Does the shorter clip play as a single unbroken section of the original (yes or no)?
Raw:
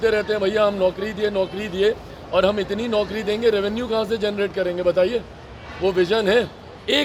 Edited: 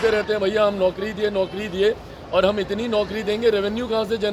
yes